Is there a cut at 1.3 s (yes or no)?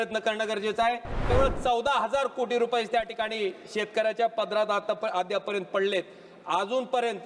yes